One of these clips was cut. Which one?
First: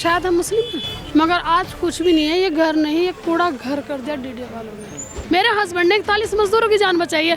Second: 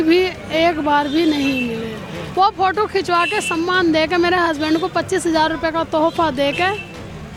first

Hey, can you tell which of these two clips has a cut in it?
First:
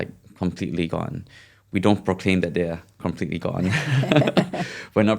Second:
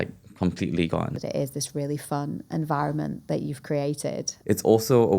second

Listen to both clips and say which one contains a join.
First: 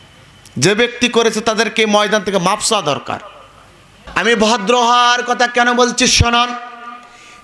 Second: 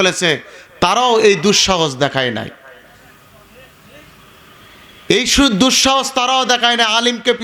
first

